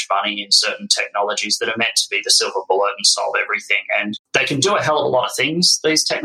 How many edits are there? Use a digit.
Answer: 1